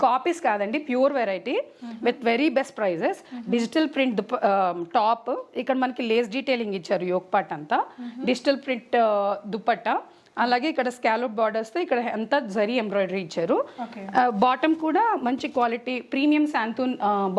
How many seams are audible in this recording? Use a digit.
0